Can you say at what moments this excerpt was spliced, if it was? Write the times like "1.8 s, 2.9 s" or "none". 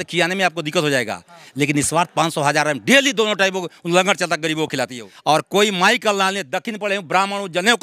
5.0 s